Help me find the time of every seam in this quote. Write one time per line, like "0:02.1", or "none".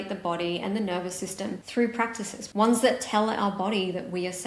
0:01.6
0:02.4